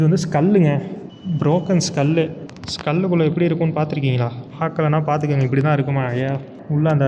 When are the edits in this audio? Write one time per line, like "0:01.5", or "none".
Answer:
none